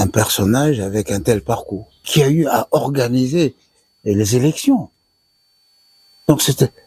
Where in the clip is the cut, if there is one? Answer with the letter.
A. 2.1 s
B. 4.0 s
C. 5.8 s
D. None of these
A